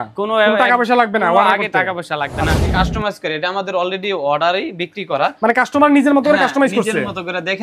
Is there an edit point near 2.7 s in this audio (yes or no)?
yes